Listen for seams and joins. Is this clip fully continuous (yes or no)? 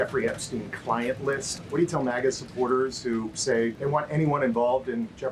no